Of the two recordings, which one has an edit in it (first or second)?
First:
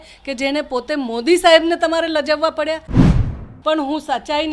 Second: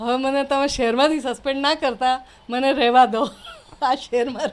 first